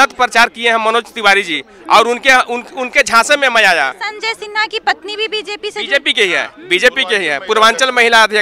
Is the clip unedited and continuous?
no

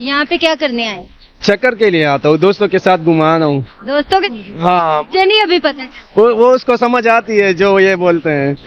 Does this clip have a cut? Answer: yes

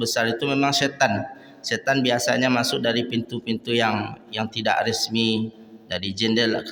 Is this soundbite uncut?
yes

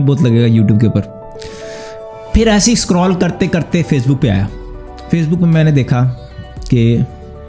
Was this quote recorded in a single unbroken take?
yes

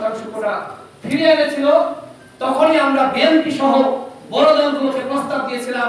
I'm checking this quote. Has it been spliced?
no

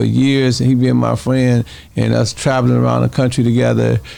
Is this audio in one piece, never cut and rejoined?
yes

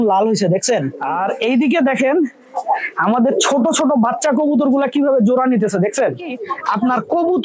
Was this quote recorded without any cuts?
no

